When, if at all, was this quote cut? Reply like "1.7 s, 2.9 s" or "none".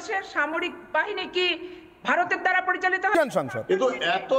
3.1 s